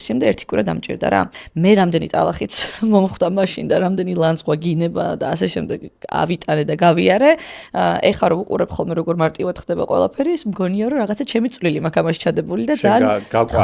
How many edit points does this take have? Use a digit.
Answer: 1